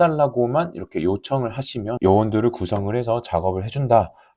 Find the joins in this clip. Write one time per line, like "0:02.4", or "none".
0:02.0